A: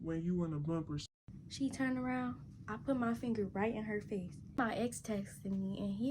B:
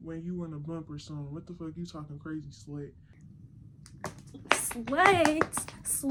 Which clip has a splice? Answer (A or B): A